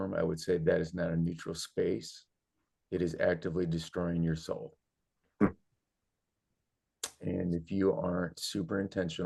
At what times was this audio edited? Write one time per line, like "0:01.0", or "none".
none